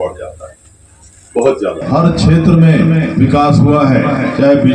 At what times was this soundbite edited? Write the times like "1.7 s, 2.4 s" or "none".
1.8 s

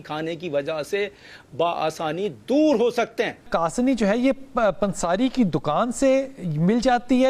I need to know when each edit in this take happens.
3.5 s

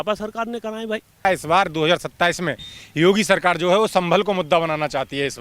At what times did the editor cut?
1.2 s

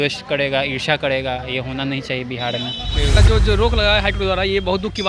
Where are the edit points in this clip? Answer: 3.2 s

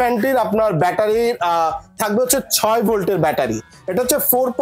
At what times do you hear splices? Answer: none

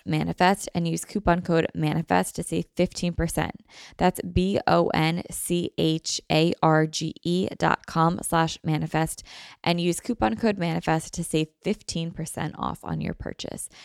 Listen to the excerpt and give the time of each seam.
none

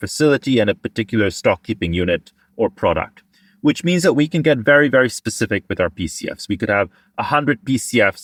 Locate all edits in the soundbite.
none

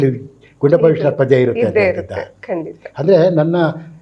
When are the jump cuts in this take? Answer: none

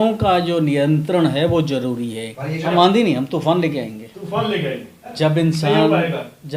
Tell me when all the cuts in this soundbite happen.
2.6 s, 5.1 s

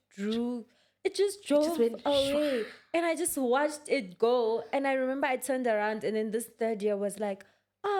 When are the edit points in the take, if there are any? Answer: none

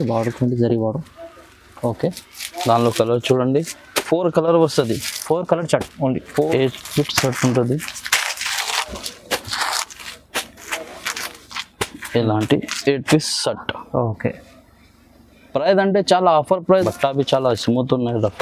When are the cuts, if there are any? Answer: 6.5 s, 16.6 s

